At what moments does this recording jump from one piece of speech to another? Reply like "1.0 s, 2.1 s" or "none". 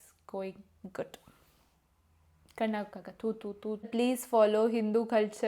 3.9 s